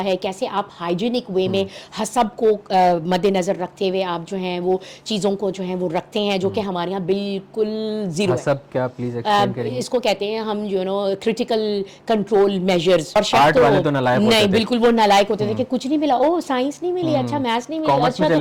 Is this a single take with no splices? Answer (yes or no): no